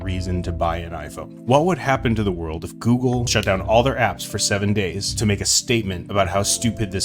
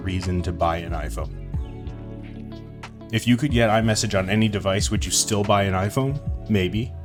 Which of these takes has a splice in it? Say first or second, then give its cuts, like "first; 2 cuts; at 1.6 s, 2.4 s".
first; 2 cuts; at 1.4 s, 3.3 s